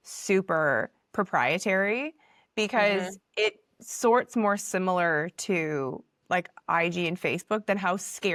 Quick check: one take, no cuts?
yes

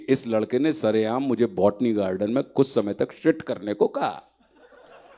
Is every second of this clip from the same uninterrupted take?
yes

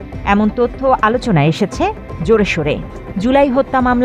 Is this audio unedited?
no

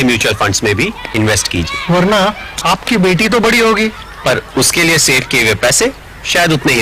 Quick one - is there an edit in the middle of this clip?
no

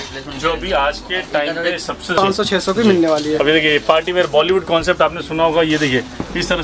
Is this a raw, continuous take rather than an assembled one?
no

